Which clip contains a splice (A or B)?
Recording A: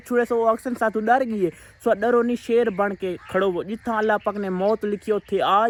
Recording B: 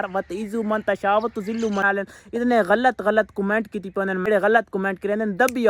B